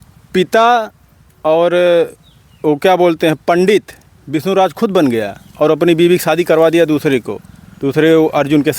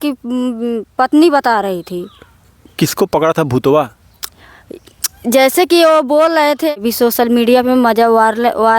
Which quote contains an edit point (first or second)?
second